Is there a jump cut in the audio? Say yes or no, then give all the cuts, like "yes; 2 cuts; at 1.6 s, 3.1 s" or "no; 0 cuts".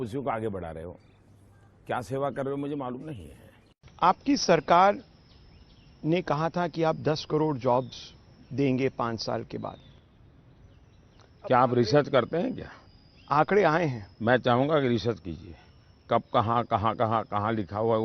yes; 1 cut; at 3.7 s